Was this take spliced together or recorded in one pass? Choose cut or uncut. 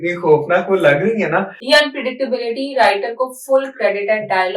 cut